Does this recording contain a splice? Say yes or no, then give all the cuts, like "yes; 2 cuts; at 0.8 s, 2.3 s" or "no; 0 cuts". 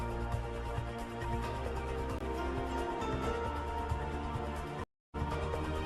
no; 0 cuts